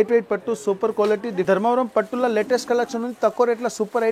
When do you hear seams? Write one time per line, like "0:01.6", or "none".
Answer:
0:01.4